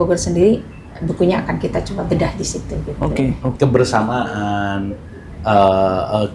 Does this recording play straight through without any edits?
no; 1 cut; at 3.5 s

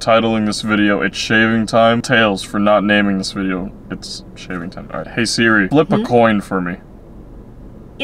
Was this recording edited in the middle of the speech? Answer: yes; 1 cut; at 5.7 s

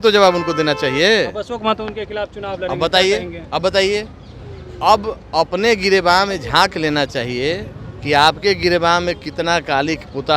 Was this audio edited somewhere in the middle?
no; 0 cuts

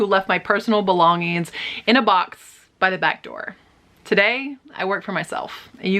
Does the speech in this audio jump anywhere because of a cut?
no; 0 cuts

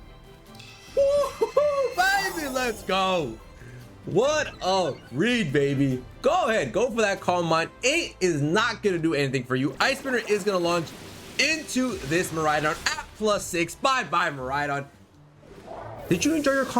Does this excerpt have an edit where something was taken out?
no; 0 cuts

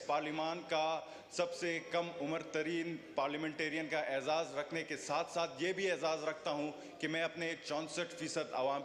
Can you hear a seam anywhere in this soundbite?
no; 0 cuts

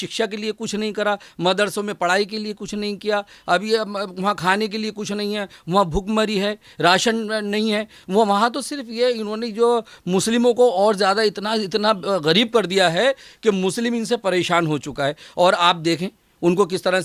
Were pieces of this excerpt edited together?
no; 0 cuts

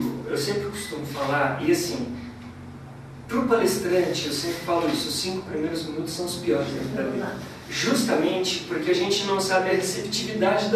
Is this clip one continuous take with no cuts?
yes; 0 cuts

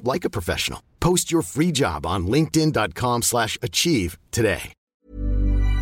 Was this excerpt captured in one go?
no; 1 cut; at 4.7 s

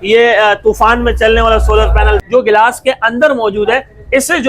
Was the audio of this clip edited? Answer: yes; 1 cut; at 2.2 s

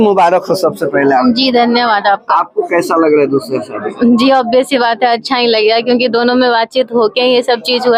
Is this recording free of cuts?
yes; 0 cuts

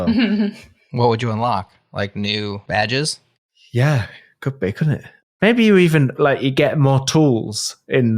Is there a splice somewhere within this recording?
yes; 1 cut; at 2.6 s

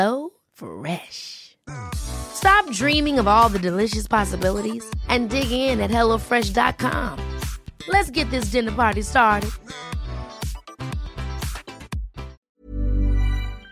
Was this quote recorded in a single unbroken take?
no; 1 cut; at 12.4 s

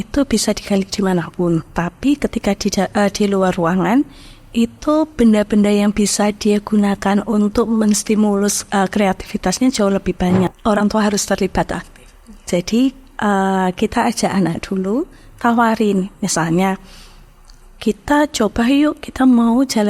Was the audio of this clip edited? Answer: yes; 1 cut; at 10.5 s

